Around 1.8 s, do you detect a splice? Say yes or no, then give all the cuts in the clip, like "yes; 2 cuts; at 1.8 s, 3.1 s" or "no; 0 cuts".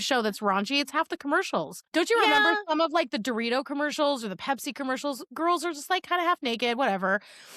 yes; 1 cut; at 1.8 s